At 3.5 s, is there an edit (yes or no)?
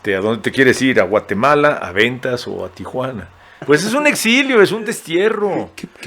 yes